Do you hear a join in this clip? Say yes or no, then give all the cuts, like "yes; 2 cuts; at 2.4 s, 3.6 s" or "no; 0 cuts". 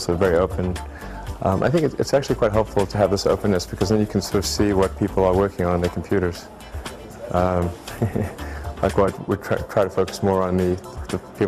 no; 0 cuts